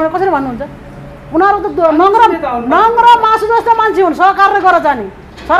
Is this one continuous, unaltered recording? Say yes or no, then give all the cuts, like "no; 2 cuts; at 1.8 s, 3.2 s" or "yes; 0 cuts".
yes; 0 cuts